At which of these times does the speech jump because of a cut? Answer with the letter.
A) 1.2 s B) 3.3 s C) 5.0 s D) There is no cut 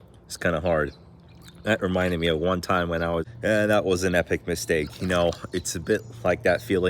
B